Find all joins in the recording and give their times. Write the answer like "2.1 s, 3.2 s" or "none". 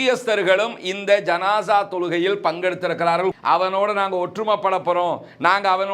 3.4 s